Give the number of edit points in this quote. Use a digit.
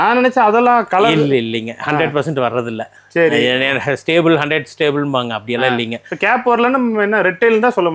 0